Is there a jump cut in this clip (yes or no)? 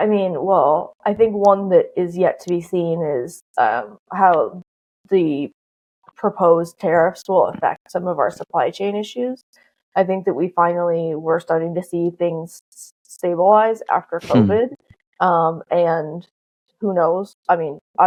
no